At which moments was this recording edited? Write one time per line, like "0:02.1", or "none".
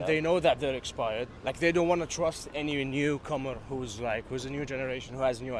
0:01.3